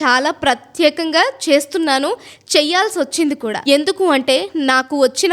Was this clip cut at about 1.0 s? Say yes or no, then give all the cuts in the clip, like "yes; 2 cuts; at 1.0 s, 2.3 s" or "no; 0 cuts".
no; 1 cut; at 3.6 s